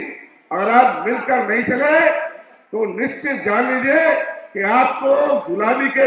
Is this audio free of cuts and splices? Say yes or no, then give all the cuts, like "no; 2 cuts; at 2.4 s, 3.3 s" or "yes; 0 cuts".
yes; 0 cuts